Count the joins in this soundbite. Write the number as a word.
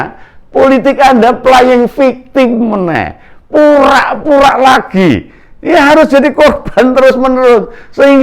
zero